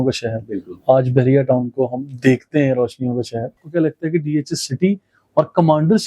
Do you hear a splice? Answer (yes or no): yes